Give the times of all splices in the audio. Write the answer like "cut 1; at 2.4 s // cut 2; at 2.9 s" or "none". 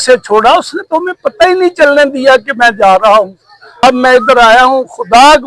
cut 1; at 3.8 s